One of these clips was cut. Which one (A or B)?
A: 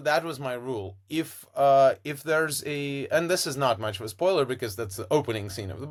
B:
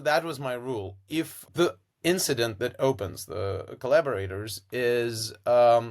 B